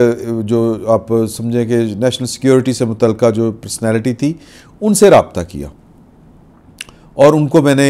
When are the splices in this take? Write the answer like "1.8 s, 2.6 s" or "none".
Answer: none